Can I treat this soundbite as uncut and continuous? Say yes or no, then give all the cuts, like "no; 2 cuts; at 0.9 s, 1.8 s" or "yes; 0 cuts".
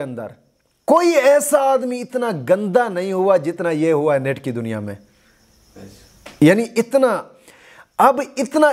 yes; 0 cuts